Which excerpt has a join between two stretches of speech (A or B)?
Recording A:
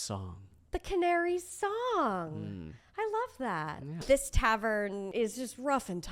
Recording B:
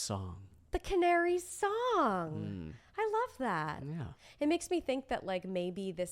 A